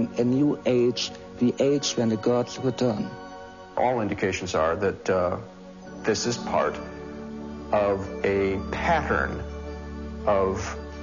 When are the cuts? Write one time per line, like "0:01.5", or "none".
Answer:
0:05.0

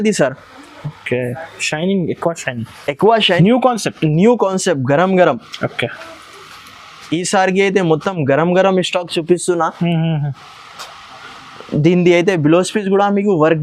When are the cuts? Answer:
0:03.4

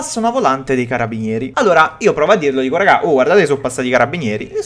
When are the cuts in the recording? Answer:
0:01.4

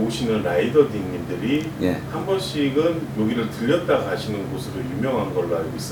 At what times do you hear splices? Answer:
none

